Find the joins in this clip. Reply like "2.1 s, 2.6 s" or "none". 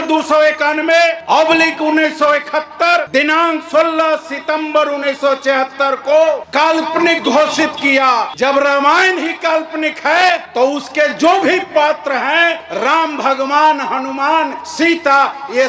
1.2 s, 3.1 s, 6.4 s, 8.3 s, 10.5 s, 12.7 s, 14.6 s